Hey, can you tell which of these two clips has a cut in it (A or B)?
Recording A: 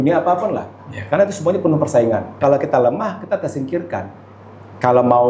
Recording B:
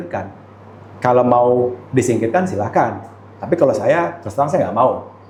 A